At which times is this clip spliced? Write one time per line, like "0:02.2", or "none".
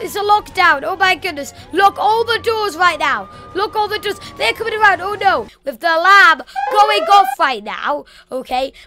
0:05.6